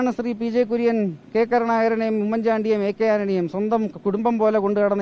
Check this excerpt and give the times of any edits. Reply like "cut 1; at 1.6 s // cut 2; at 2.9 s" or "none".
none